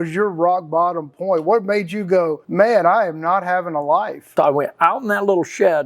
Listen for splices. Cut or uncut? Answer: cut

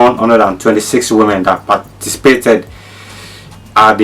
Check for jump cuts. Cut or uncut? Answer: uncut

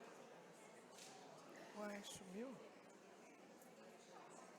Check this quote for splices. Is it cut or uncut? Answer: cut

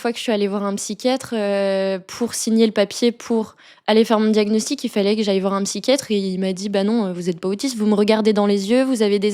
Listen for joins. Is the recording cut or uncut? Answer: uncut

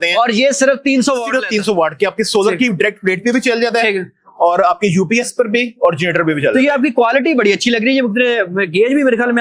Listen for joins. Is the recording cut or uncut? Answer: uncut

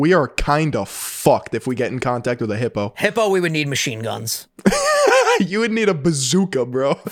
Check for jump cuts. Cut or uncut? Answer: uncut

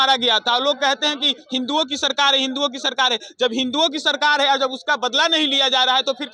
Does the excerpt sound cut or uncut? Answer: uncut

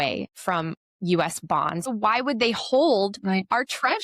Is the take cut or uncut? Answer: cut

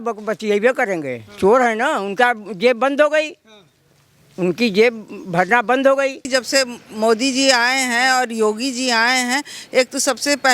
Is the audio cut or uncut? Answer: cut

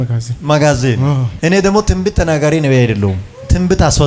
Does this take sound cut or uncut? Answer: cut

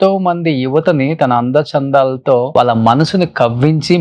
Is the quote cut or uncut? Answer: cut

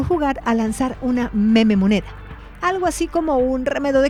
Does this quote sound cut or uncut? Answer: uncut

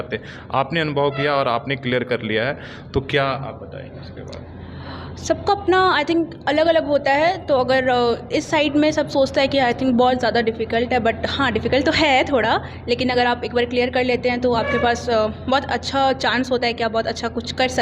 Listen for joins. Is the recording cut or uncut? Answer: uncut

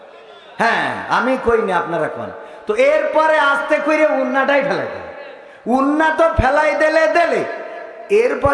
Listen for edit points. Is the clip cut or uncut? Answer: uncut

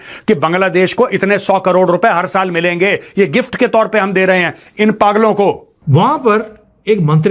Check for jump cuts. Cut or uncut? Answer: cut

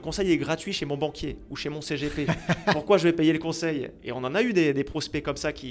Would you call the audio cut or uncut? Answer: uncut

